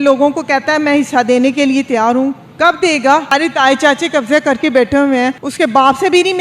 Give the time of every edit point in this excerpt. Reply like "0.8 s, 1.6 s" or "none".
3.3 s, 5.5 s

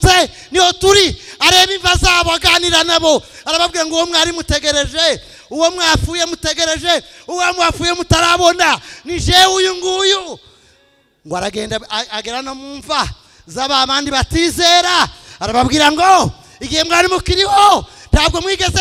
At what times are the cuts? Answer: none

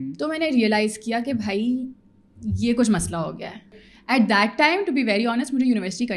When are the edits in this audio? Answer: 3.7 s

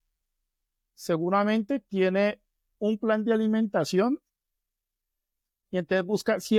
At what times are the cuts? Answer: none

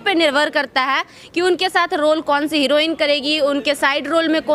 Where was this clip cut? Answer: none

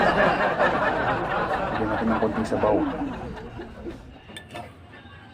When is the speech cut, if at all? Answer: 1.7 s

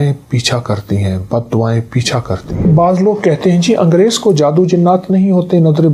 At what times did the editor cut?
2.6 s

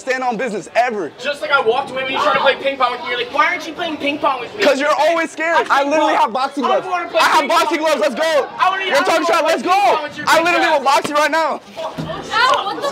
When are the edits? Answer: 5.6 s

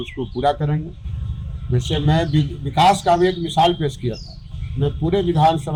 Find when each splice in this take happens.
none

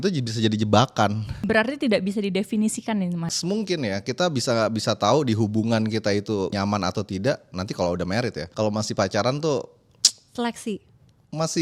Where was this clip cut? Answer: 1.3 s, 3.3 s, 6.5 s, 8.4 s

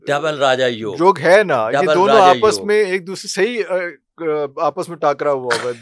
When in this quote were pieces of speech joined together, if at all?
none

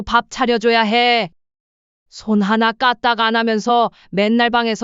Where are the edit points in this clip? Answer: 1.3 s

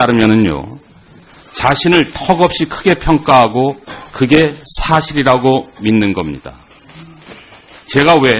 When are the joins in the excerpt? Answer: 4.3 s

